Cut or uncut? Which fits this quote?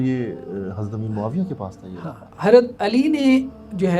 cut